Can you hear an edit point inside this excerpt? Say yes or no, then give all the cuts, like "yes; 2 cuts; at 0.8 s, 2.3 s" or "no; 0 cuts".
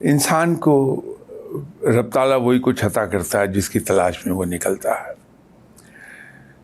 no; 0 cuts